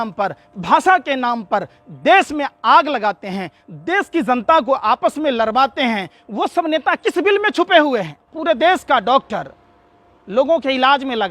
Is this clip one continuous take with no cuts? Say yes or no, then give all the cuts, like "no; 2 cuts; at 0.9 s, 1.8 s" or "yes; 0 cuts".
no; 1 cut; at 8.3 s